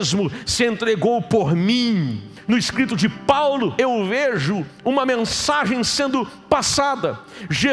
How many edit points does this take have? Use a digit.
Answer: 2